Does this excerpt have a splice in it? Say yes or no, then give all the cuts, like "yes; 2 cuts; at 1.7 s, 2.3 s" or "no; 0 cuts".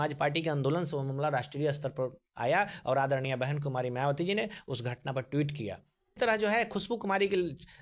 yes; 1 cut; at 6.2 s